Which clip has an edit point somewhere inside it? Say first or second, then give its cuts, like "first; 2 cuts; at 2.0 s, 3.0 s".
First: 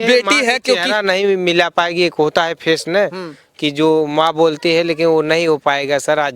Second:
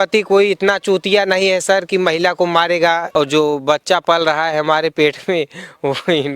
second; 1 cut; at 3.0 s